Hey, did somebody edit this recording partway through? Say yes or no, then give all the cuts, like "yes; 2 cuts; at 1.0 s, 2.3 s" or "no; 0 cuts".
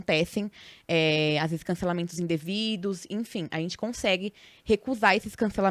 no; 0 cuts